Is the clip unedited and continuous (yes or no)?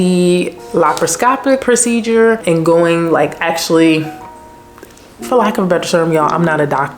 no